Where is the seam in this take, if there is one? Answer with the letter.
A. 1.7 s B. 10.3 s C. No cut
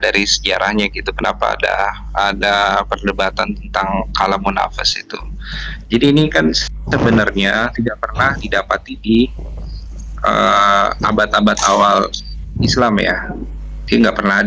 C